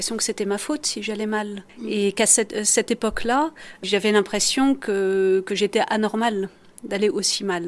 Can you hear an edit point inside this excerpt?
yes; 2 cuts; at 1.7 s, 3.8 s

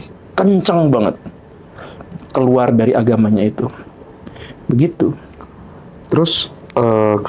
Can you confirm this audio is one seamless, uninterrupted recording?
yes; 0 cuts

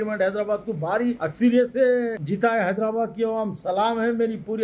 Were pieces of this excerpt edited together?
yes; 2 cuts; at 1.3 s, 2.2 s

